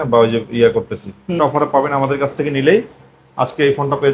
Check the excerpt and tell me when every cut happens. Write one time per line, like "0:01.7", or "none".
0:01.4